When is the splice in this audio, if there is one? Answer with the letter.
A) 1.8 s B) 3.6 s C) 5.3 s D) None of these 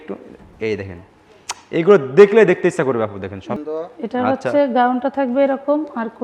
B